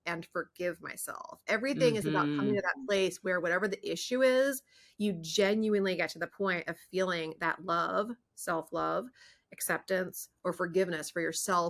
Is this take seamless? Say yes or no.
yes